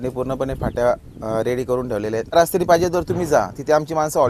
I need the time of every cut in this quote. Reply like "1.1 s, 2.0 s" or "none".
2.4 s